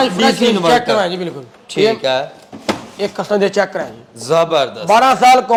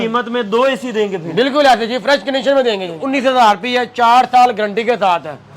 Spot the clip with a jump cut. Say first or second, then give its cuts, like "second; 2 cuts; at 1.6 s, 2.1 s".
second; 1 cut; at 3.0 s